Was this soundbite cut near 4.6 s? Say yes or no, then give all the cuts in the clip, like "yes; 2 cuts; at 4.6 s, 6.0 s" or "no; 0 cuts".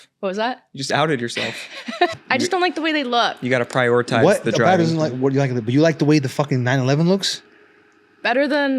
no; 1 cut; at 2.1 s